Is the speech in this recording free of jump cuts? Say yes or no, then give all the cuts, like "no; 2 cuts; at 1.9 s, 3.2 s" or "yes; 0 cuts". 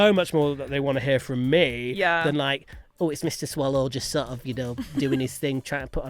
yes; 0 cuts